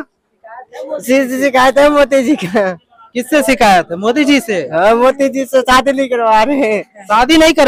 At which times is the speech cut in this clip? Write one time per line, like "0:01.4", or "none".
none